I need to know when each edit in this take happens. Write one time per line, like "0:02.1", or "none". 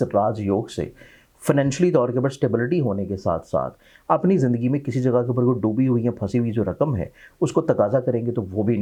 none